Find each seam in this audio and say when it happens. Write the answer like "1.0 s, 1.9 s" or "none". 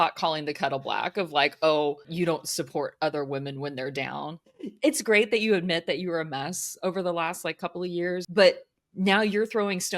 2.1 s, 4.4 s, 8.3 s